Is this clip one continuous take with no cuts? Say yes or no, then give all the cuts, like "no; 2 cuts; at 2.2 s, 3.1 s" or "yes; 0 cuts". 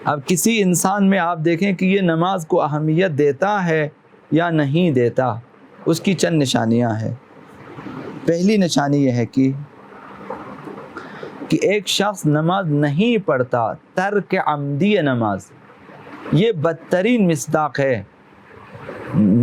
yes; 0 cuts